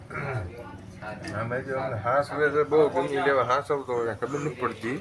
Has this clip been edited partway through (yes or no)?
no